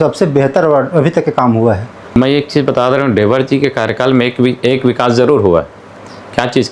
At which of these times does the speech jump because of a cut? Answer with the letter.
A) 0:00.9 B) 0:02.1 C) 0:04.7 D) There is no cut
B